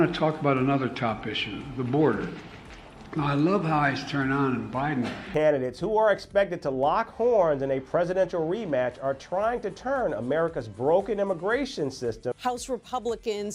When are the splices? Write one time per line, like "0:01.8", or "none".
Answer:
0:05.3
0:12.3